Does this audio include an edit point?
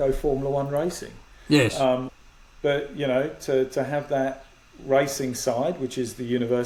no; 0 cuts

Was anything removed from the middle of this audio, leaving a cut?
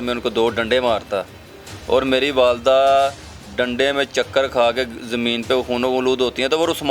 no; 0 cuts

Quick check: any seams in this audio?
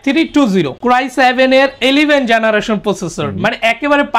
no; 0 cuts

